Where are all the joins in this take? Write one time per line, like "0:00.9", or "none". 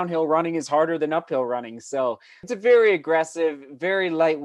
0:02.5